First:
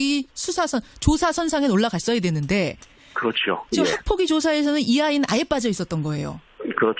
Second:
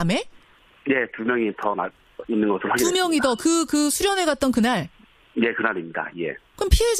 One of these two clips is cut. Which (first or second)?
first